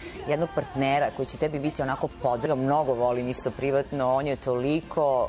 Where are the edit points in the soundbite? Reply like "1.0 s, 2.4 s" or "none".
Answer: 2.5 s